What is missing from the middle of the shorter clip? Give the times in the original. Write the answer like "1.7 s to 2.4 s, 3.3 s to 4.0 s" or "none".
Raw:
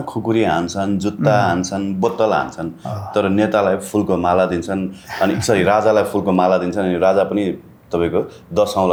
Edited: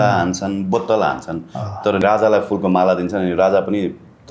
3.3 s to 5.6 s